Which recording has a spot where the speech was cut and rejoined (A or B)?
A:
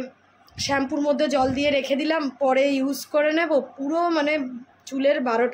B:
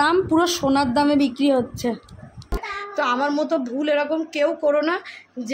B